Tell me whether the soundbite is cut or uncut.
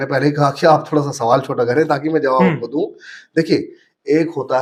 uncut